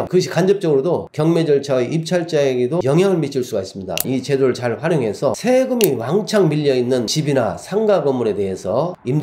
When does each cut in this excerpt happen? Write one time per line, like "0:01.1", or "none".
0:04.0
0:05.4
0:07.1